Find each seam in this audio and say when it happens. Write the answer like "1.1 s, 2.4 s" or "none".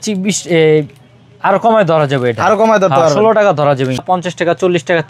4.0 s